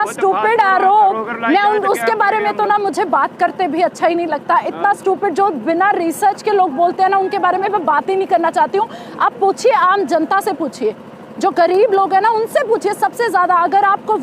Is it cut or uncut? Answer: uncut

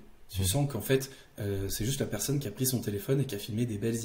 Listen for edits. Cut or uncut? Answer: uncut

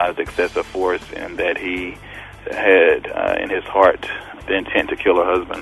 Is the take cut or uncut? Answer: cut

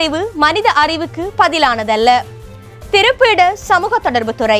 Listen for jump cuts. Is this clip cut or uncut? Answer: uncut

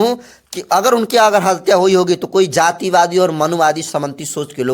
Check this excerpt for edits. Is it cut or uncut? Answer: uncut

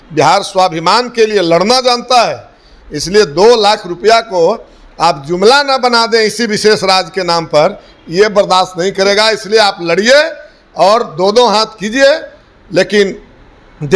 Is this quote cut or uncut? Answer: uncut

